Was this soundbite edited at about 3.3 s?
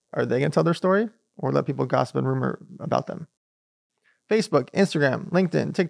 yes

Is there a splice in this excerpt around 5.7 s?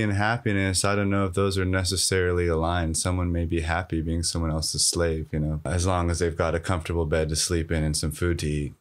yes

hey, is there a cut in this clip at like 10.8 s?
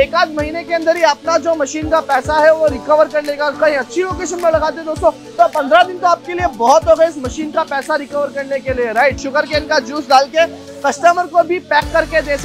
no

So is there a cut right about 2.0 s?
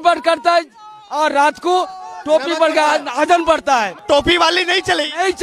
no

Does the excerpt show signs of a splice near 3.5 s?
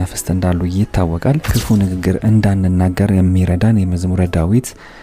no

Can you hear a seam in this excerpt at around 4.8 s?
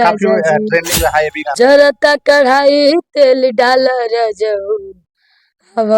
no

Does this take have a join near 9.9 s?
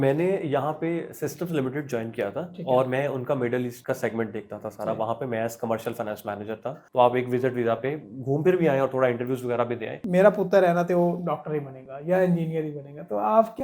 yes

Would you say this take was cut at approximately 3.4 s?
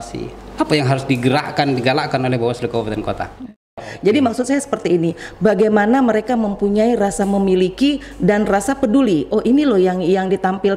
yes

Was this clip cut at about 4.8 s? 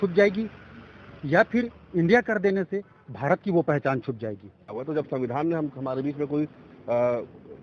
yes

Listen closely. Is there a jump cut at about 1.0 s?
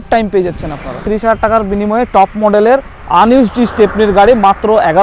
yes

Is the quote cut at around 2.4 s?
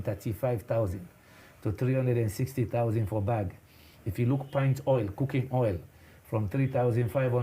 no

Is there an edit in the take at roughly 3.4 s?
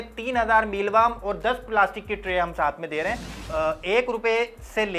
yes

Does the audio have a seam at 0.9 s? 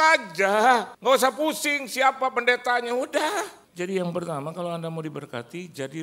yes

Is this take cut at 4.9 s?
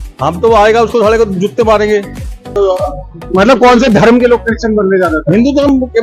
no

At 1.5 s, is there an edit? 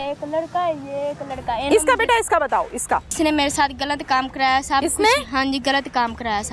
no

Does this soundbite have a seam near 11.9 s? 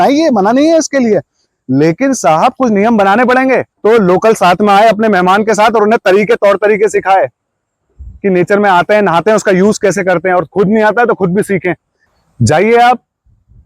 yes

